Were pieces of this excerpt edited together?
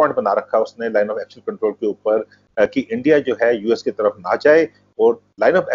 no; 0 cuts

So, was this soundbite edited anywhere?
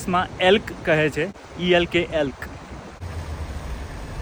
no; 0 cuts

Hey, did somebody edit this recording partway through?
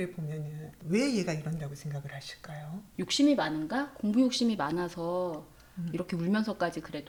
no; 0 cuts

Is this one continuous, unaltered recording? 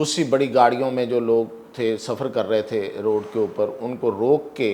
yes; 0 cuts

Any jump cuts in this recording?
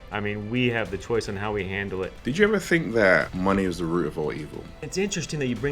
yes; 3 cuts; at 2.2 s, 3.3 s, 4.8 s

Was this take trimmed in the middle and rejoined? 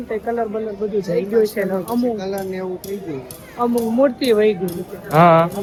no; 0 cuts

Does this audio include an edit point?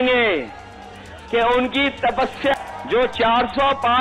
yes; 1 cut; at 2.6 s

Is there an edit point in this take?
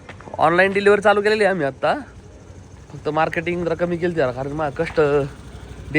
no; 0 cuts

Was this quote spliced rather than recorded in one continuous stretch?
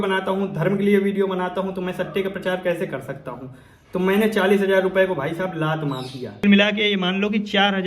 yes; 1 cut; at 6.4 s

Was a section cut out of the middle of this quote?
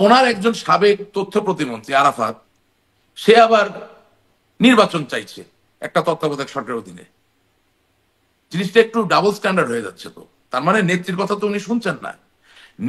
no; 0 cuts

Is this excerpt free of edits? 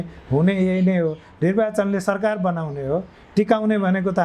yes; 0 cuts

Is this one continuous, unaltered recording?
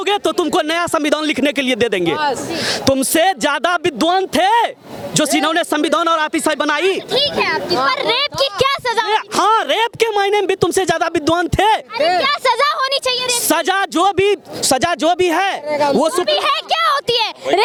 yes; 0 cuts

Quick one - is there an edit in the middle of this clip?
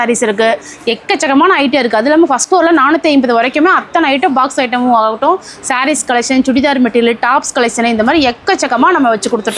no; 0 cuts

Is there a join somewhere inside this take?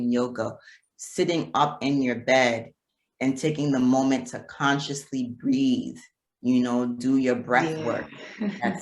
no; 0 cuts

